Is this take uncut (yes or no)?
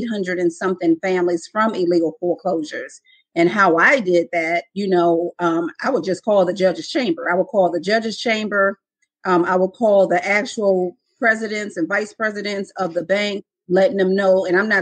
yes